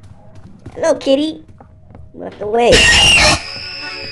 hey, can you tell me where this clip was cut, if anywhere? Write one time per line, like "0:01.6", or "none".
0:02.8